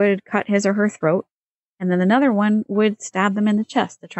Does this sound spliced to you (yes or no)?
no